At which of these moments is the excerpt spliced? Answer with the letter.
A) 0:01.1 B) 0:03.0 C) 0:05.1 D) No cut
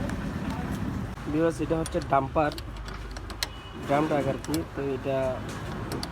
A